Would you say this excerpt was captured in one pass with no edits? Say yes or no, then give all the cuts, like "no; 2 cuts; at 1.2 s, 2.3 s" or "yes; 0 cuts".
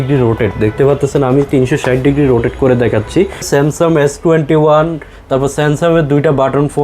no; 1 cut; at 3.5 s